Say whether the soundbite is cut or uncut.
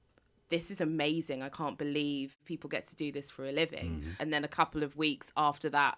cut